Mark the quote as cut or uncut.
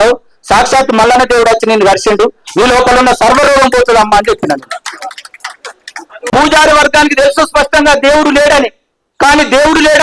cut